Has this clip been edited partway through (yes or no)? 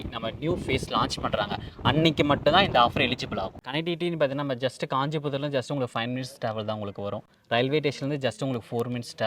yes